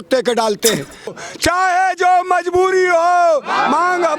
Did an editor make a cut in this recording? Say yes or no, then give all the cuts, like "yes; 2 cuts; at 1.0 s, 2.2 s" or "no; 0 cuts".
yes; 1 cut; at 1.2 s